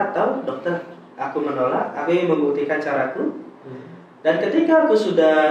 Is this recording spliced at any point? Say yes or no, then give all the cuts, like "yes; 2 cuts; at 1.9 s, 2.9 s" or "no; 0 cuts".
no; 0 cuts